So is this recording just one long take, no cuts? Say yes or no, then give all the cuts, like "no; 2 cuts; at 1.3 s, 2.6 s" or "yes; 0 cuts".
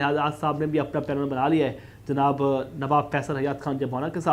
yes; 0 cuts